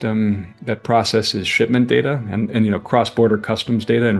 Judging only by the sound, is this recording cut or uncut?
uncut